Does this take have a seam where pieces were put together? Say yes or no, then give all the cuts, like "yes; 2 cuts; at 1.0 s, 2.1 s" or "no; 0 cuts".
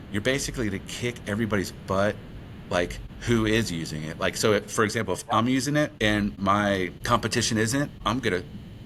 no; 0 cuts